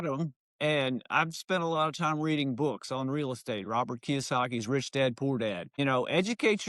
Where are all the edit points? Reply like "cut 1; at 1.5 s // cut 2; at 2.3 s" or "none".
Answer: cut 1; at 5.7 s